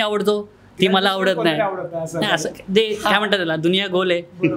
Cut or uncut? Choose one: uncut